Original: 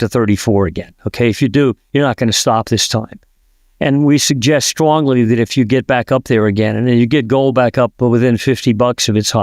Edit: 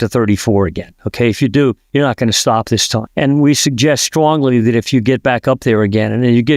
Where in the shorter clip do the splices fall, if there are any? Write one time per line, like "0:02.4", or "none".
0:03.1